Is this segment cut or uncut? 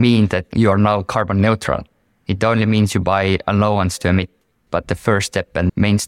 cut